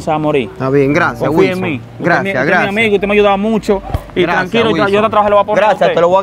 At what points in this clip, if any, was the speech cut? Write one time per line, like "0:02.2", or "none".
none